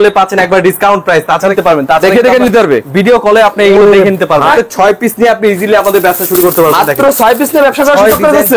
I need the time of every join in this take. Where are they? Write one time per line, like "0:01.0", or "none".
0:01.5
0:04.5